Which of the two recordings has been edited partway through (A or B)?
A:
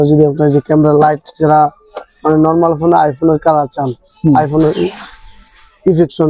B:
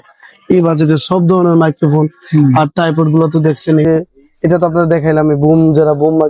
B